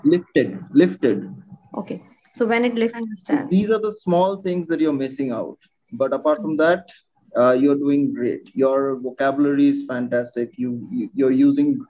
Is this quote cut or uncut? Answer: cut